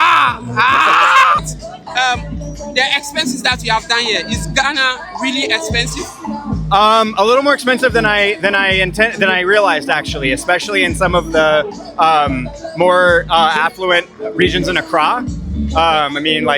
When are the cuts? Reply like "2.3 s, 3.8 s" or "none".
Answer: 1.4 s